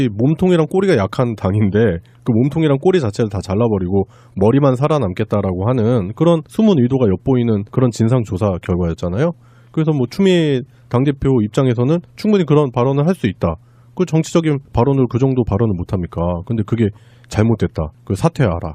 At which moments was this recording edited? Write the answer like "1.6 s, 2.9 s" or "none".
none